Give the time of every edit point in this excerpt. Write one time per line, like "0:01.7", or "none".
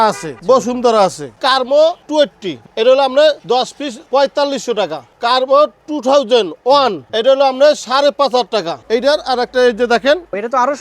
0:01.3
0:08.8